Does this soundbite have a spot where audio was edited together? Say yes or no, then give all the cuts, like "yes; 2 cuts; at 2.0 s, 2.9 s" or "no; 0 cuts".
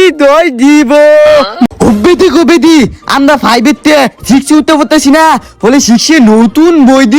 yes; 1 cut; at 1.6 s